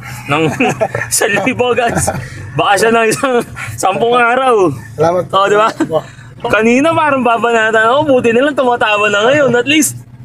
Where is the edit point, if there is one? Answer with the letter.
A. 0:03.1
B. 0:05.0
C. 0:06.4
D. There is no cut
C